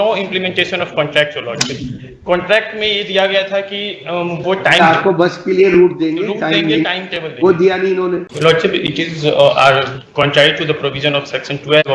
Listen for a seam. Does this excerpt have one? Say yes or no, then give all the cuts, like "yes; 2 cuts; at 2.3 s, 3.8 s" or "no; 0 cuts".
yes; 1 cut; at 8.3 s